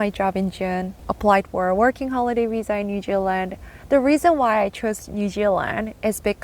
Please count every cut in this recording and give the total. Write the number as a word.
one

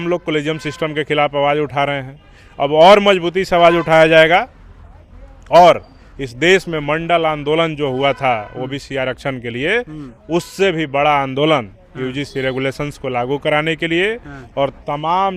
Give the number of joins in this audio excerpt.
zero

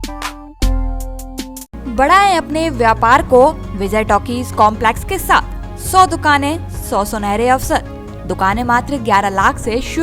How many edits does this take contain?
zero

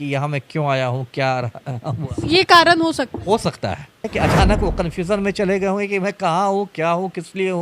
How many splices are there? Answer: one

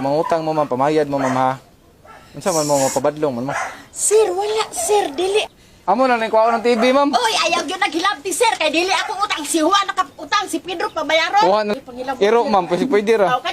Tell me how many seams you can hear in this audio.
two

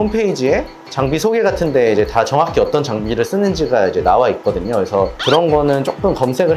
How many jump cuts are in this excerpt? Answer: one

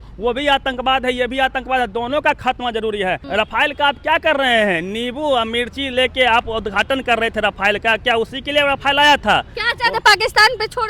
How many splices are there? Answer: two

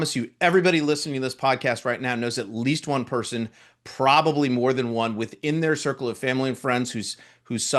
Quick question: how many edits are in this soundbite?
zero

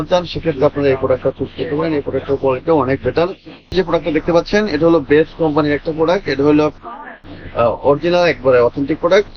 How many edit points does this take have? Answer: two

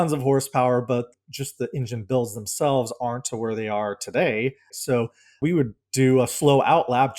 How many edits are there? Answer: two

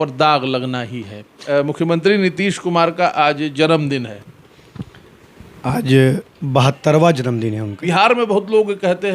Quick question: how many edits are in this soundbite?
two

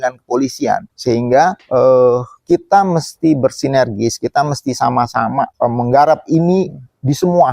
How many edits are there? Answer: three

